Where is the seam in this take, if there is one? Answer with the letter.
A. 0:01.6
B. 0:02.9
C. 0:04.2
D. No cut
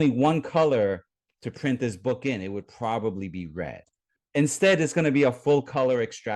C